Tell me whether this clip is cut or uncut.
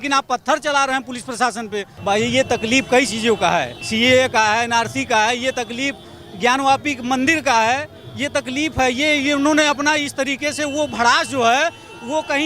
cut